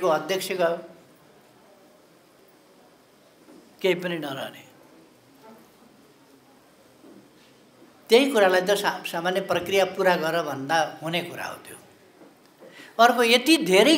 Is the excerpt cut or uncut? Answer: uncut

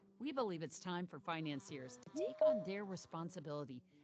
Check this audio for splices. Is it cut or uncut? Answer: cut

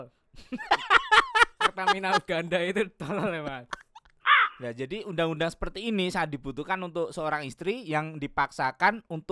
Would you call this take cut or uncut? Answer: cut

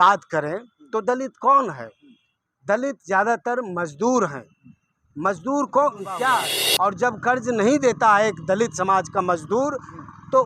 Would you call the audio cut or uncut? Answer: cut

